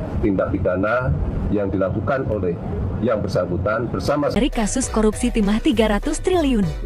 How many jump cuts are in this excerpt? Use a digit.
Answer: 1